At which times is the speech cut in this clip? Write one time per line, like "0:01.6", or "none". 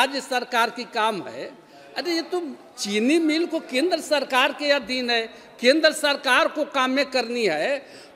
none